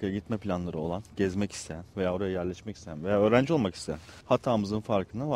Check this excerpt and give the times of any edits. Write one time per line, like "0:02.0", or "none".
0:04.1